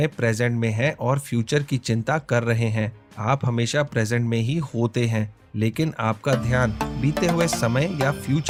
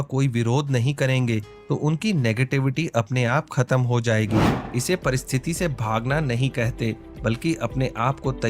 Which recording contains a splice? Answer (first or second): second